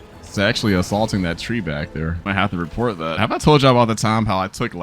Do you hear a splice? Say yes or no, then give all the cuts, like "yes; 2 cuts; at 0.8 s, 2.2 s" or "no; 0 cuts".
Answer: yes; 1 cut; at 3.1 s